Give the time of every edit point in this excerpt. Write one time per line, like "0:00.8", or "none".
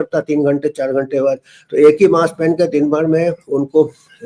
none

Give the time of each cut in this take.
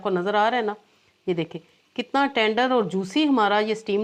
none

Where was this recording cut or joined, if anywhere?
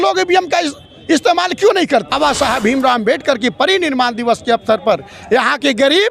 0:02.1

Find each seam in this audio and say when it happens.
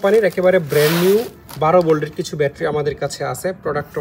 none

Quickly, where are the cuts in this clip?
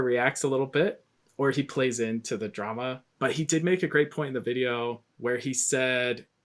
0:03.0

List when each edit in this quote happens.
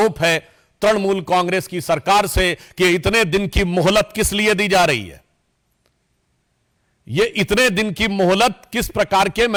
none

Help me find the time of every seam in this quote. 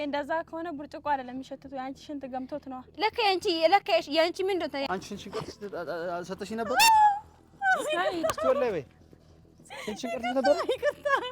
0:04.8

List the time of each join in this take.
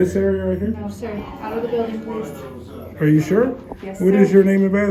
none

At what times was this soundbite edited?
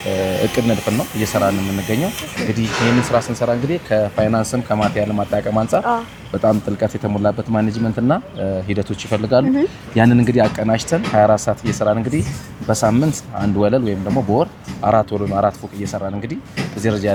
none

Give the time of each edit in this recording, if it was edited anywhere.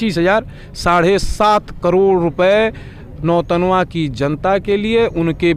none

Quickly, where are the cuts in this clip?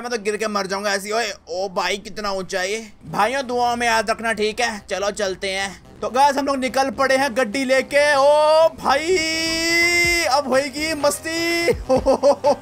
0:03.0

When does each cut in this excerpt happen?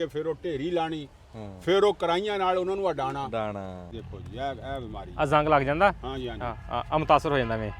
0:03.9

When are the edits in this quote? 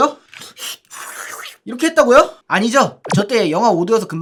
none

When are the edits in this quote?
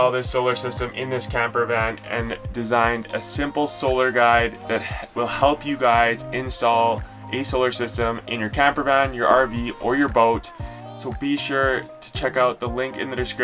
0:10.7

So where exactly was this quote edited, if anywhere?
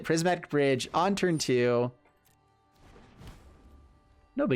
none

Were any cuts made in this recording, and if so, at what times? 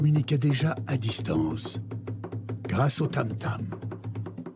none

